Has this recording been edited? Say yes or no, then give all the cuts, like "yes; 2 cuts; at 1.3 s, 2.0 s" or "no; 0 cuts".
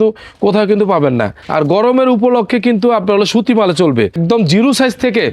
yes; 2 cuts; at 1.4 s, 4.1 s